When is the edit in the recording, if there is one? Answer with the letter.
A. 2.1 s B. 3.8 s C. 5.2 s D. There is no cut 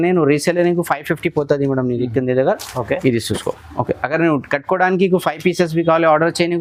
D